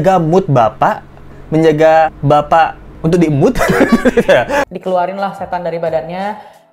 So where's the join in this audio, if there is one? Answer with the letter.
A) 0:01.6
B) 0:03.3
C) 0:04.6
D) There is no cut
C